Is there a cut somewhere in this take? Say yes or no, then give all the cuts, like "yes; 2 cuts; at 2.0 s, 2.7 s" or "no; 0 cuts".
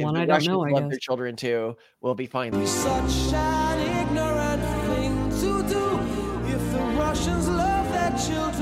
no; 0 cuts